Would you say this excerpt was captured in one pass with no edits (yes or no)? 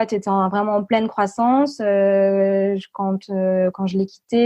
yes